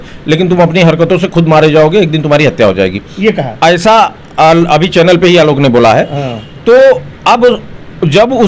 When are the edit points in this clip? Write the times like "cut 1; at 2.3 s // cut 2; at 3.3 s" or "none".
none